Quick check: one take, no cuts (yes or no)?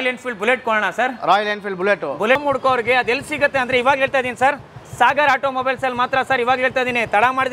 no